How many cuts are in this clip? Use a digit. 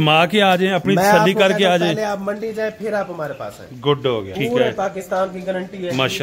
1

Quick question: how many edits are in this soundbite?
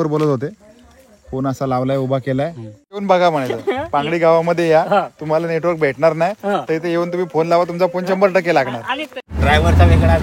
2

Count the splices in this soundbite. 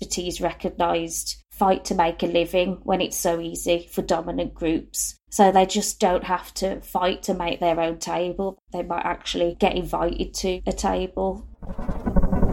1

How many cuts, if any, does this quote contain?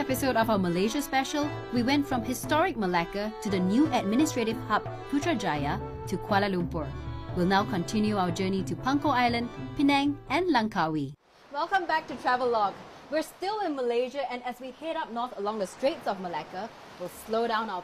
1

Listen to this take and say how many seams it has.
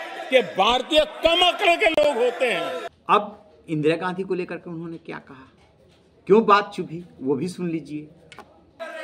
0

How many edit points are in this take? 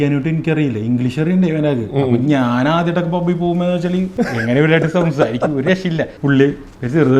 2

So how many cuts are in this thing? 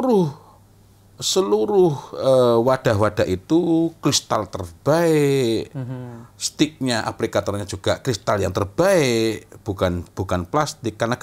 0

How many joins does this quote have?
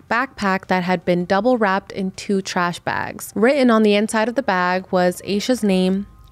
1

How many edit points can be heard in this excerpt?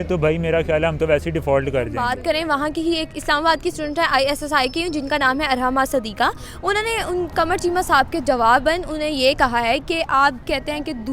1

